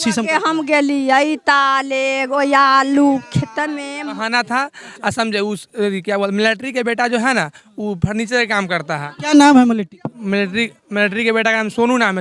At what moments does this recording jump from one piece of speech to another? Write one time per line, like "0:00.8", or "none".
0:04.2